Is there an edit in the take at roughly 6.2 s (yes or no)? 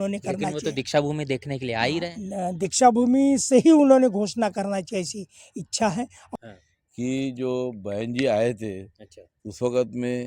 yes